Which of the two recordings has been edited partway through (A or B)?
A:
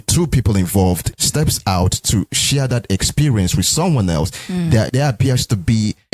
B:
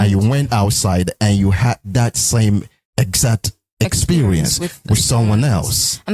A